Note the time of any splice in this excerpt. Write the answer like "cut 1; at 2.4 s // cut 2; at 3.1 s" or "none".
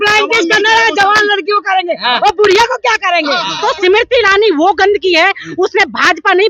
cut 1; at 3.5 s